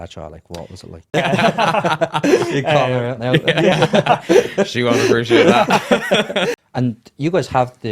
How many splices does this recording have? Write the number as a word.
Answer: two